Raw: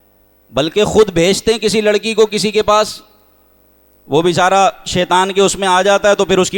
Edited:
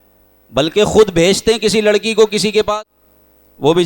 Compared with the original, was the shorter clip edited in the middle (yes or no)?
yes